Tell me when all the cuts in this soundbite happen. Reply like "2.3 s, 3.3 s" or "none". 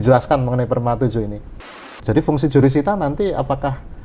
1.9 s